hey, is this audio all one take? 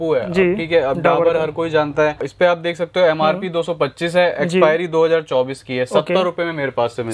no; 1 cut; at 2.2 s

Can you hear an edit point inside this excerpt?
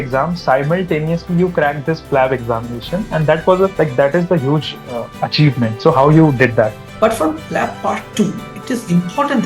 yes; 1 cut; at 6.8 s

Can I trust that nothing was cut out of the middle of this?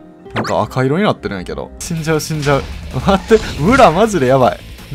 no; 1 cut; at 1.7 s

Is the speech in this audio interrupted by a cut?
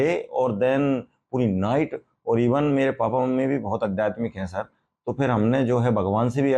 no; 0 cuts

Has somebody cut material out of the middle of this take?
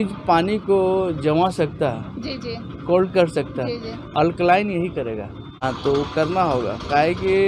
yes; 1 cut; at 5.5 s

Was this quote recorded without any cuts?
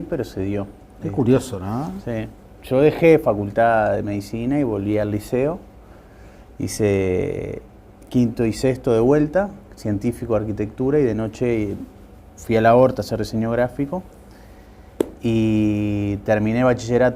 no; 1 cut; at 16.1 s

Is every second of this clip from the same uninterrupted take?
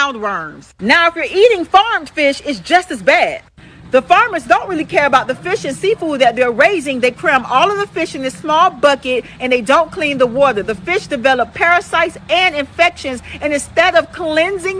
no; 1 cut; at 1.0 s

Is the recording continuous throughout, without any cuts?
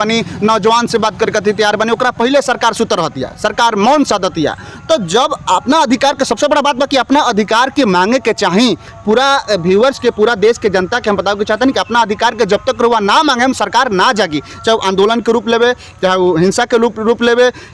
yes; 0 cuts

